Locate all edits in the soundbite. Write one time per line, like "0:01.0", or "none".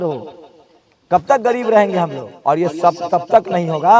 0:02.3

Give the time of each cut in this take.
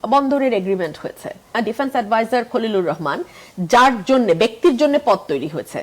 0:01.5

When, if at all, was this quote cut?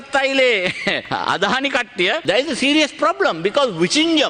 0:01.0
0:02.2

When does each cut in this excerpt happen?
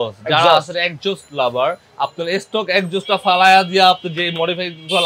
none

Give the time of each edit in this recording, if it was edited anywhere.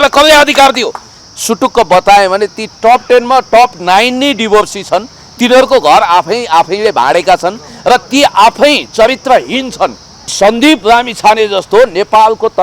0:01.1
0:10.3

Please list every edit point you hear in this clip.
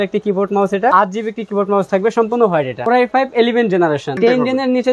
0:00.9
0:02.8
0:04.1

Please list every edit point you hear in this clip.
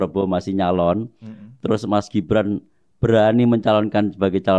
none

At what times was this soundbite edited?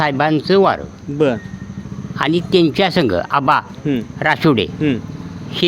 none

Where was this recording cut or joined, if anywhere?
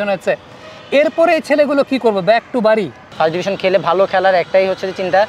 0:03.1

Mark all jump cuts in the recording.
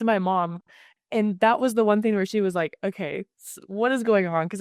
none

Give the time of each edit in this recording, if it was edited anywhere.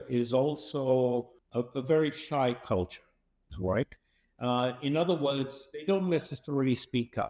0:01.4

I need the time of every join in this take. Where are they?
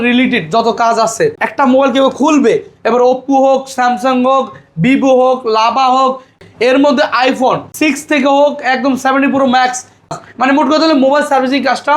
0:01.4
0:06.4
0:07.7
0:10.1

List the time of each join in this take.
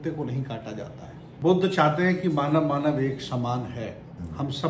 0:01.2

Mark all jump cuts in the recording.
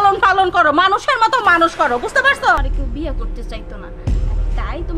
0:02.6

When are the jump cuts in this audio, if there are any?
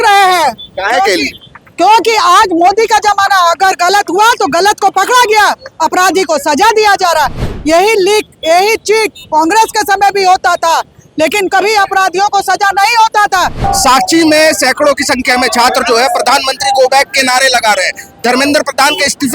0:13.6

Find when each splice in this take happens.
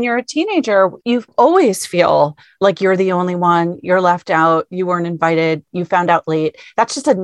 0:01.0

